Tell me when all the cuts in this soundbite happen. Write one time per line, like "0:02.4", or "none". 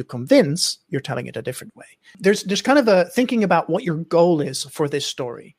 0:02.1